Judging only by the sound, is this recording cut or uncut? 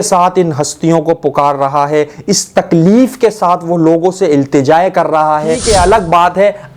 cut